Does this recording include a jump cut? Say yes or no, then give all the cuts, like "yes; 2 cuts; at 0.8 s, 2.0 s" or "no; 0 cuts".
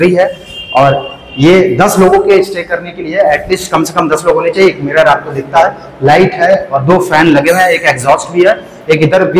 no; 0 cuts